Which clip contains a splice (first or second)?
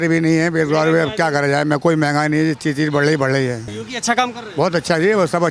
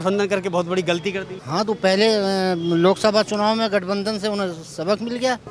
first